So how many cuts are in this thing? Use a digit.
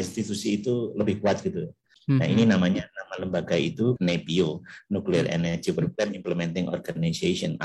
2